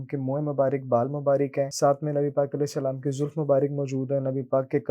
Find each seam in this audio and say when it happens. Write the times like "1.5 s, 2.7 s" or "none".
1.7 s